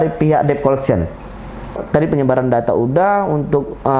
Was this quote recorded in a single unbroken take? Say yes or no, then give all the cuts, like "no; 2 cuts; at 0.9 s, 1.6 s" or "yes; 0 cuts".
no; 1 cut; at 1.8 s